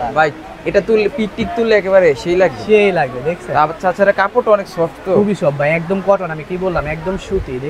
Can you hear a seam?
no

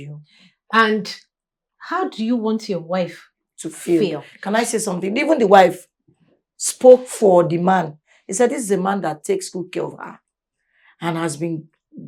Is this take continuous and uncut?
yes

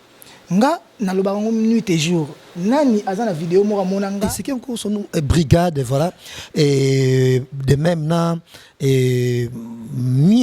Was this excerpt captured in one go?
no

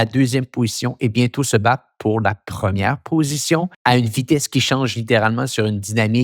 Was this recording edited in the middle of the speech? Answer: yes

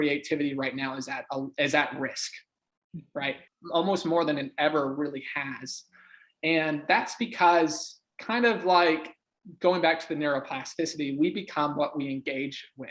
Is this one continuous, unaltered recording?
no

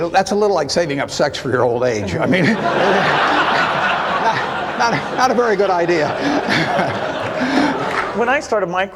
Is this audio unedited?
no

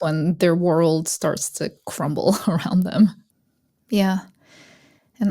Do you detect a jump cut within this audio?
yes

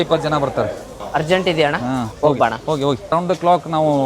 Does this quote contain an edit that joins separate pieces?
yes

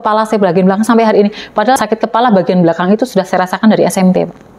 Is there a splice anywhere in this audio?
yes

